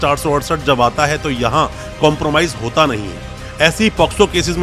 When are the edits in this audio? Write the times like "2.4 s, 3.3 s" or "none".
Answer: none